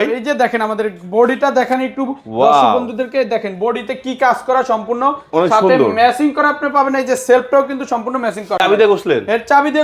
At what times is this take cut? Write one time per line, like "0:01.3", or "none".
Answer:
0:08.6